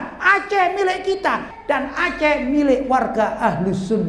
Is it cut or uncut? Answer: cut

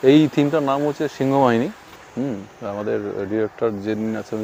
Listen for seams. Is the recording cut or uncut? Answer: uncut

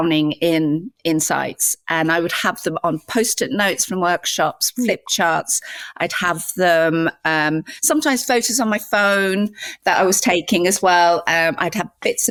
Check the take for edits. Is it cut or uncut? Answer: uncut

